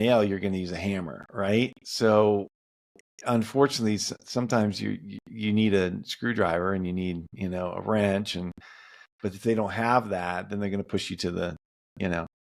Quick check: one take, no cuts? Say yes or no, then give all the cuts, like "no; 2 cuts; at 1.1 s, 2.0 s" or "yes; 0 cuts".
yes; 0 cuts